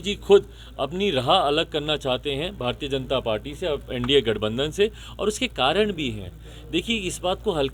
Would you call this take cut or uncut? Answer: uncut